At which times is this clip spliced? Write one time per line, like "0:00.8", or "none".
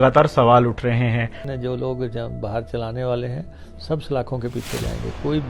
0:01.4